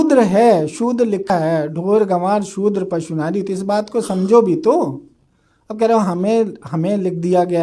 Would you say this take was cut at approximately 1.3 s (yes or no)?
yes